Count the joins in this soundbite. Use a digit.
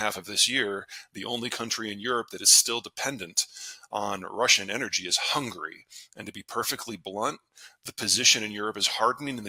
0